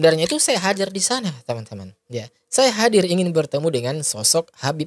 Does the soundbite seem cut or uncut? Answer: uncut